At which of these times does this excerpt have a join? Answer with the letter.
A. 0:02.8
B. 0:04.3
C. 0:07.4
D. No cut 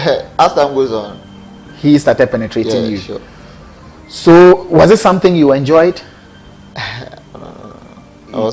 C